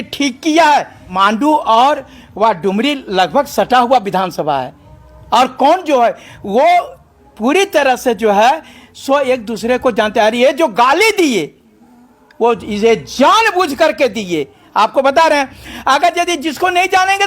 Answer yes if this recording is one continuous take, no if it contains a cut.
no